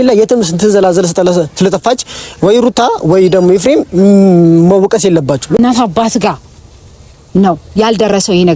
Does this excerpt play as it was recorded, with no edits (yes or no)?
no